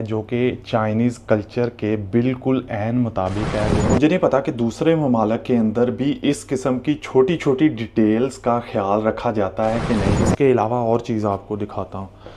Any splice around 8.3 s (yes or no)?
no